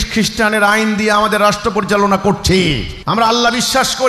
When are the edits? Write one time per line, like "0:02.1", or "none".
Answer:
0:02.9